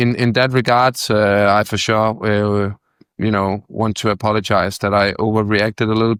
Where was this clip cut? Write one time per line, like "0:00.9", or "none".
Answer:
none